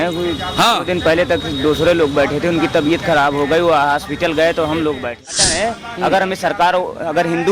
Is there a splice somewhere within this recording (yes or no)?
yes